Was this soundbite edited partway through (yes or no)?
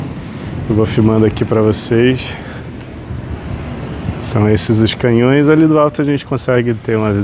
no